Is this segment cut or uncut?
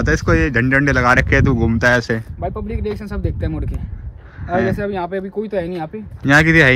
uncut